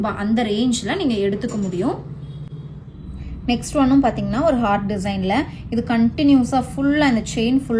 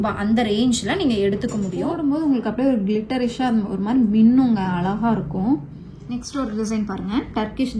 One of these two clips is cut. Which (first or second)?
second